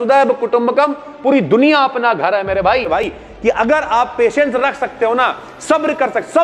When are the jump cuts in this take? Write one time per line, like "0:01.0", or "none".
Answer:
0:03.1